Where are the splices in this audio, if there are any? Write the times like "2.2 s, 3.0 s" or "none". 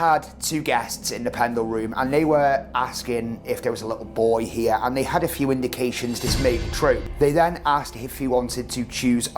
4.8 s, 7.2 s